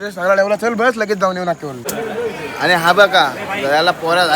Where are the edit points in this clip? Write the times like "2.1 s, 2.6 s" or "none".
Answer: 1.9 s